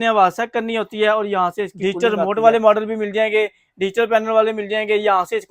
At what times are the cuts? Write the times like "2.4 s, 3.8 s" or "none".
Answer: 1.7 s